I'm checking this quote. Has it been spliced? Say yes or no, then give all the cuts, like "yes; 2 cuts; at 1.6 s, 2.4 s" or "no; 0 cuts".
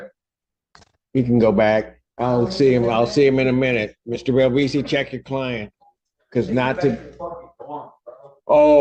no; 0 cuts